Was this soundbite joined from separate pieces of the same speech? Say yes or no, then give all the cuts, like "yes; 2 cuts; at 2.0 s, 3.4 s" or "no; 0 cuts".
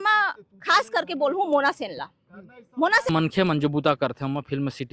yes; 1 cut; at 3.1 s